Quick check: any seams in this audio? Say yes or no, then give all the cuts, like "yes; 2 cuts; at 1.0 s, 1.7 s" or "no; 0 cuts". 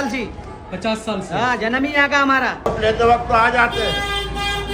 yes; 1 cut; at 2.7 s